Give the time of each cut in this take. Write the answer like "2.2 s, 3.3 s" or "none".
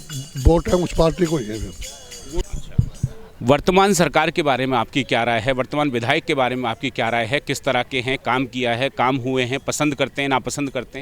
2.3 s